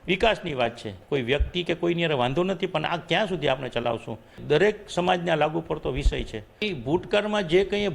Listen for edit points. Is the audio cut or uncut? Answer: cut